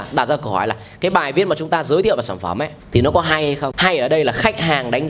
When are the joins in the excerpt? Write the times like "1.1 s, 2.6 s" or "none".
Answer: 2.7 s, 3.7 s